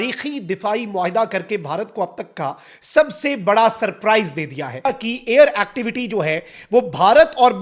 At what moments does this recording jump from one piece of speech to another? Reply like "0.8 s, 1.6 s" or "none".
4.9 s